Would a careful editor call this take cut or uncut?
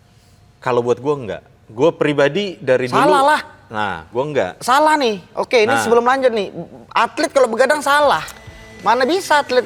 uncut